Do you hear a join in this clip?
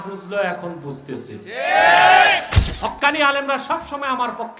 yes; 1 cut; at 2.6 s

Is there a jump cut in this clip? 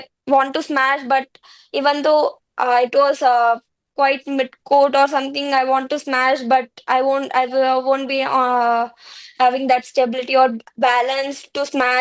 no; 0 cuts

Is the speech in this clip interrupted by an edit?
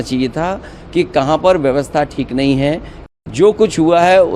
yes; 1 cut; at 2.9 s

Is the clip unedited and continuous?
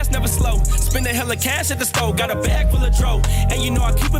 yes; 0 cuts

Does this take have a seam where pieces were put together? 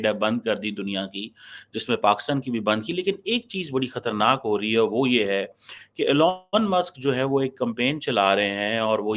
no; 0 cuts

